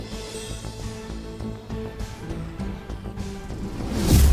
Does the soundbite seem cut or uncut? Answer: uncut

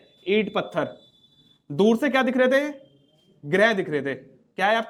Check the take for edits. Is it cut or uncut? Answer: uncut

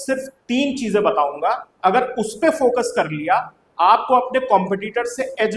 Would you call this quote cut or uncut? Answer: uncut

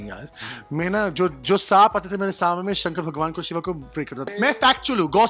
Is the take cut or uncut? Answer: cut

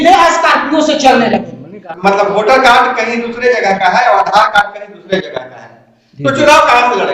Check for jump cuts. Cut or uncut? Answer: cut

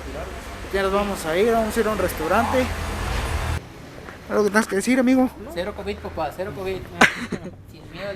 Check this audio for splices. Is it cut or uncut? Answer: cut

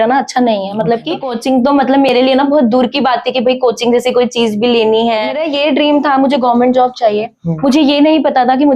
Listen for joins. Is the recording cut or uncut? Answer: cut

